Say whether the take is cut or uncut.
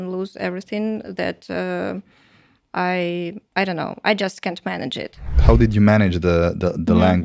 cut